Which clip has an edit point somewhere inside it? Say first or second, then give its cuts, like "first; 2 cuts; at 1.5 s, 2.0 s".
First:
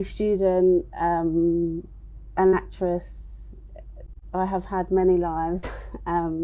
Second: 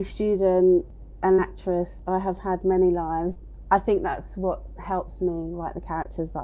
second; 3 cuts; at 0.9 s, 2.0 s, 3.5 s